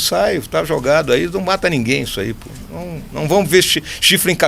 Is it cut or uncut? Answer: uncut